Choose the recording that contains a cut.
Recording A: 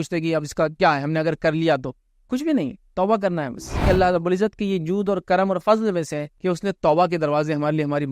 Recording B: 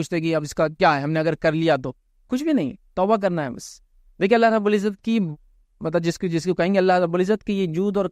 A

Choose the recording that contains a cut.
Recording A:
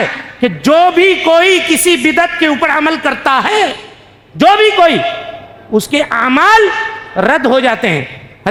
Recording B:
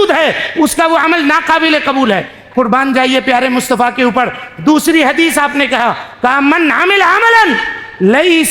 B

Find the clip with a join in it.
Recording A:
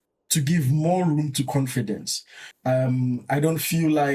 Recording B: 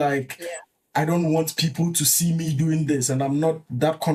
A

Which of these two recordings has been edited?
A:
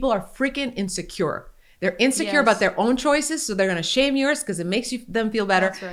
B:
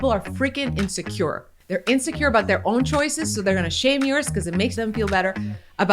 B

